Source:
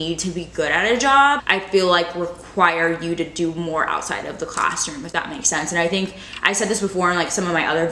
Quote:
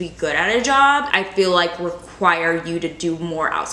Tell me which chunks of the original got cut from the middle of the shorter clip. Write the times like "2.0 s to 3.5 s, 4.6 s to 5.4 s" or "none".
none

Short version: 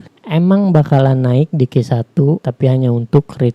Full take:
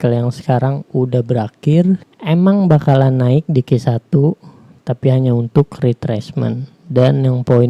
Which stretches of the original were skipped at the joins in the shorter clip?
4.4 s to 4.9 s

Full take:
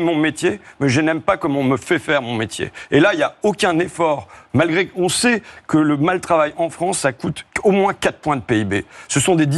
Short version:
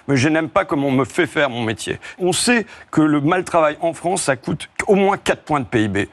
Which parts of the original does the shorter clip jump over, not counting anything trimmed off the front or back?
2.8 s to 4.9 s

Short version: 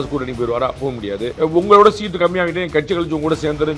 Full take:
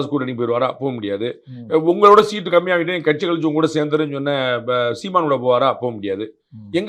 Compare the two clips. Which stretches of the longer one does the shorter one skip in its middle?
1.3 s to 1.6 s

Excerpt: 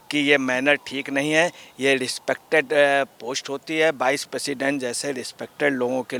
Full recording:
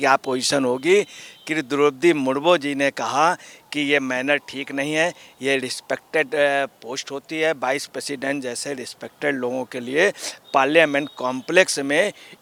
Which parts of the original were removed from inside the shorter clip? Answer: none

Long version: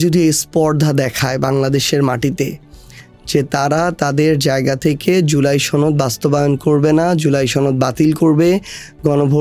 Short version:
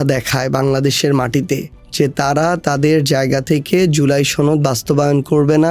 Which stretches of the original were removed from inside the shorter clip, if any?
2.7 s to 3.1 s

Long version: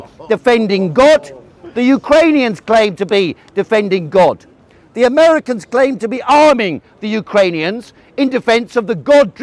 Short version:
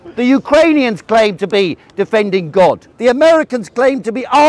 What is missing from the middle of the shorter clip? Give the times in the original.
4.5 s to 4.8 s

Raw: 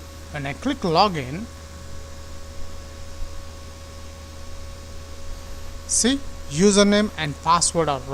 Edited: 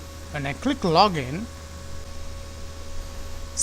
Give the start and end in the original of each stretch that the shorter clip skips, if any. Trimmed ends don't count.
2.0 s to 4.4 s

